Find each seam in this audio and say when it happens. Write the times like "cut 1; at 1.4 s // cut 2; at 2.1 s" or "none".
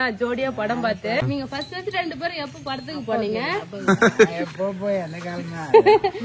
cut 1; at 1.2 s